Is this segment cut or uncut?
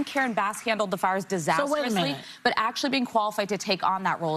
uncut